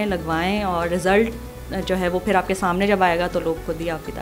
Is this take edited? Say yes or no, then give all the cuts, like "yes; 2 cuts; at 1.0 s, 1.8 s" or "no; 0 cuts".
no; 0 cuts